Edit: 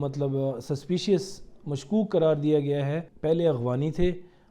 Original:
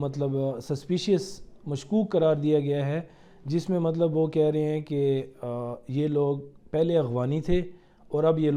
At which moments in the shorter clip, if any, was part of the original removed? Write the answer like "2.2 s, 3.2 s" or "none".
3.1 s

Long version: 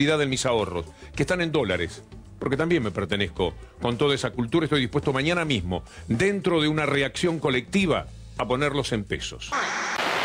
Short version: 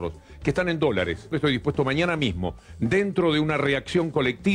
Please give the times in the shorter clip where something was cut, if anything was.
1.3 s

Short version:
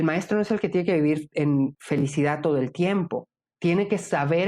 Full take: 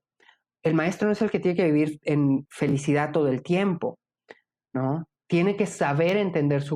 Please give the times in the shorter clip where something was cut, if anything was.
3.4 s

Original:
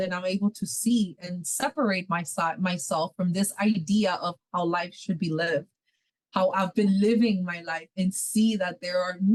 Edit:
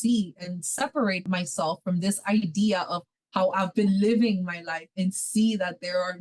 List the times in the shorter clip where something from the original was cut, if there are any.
1.2 s, 3.0 s

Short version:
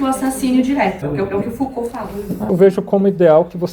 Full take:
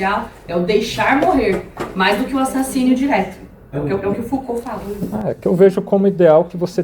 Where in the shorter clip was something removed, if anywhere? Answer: 1.0 s, 2.5 s

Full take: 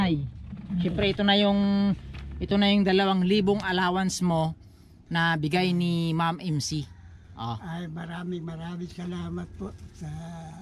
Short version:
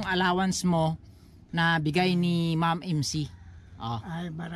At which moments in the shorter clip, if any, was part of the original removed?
none

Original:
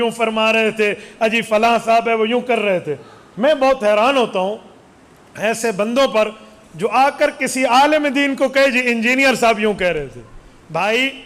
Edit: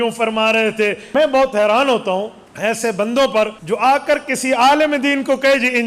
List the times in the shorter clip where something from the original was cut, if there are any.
1.0 s, 2.4 s, 3.6 s

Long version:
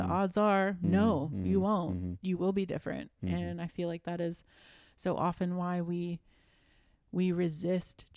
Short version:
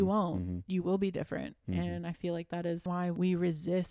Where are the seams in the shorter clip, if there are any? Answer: 3.0 s

